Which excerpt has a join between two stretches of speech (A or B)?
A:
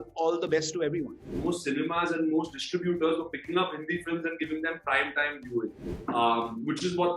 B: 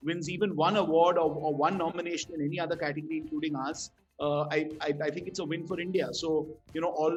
A